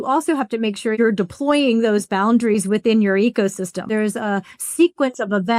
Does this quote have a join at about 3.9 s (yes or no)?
yes